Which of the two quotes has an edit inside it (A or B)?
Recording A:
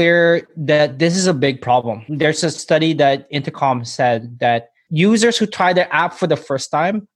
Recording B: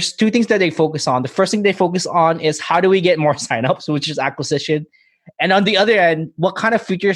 A